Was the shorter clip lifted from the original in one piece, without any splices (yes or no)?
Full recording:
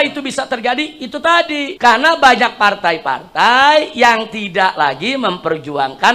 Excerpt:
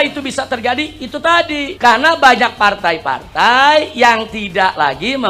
yes